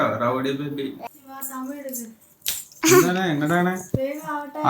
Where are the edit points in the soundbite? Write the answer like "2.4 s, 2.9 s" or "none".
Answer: 1.0 s